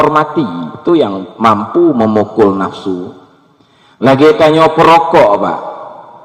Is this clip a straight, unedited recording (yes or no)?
yes